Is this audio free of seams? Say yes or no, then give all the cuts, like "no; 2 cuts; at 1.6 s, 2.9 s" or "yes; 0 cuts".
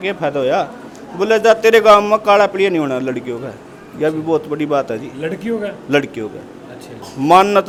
yes; 0 cuts